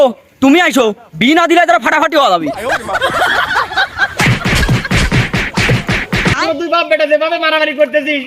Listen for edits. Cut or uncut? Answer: cut